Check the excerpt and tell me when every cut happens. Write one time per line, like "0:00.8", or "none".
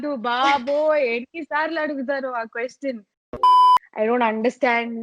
0:03.2
0:03.9